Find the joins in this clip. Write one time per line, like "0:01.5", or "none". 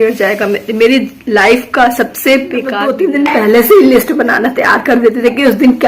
0:02.9